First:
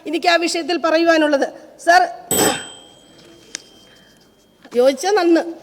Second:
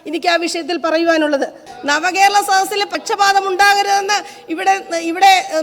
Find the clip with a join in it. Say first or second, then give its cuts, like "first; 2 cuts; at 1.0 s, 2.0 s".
second; 1 cut; at 1.7 s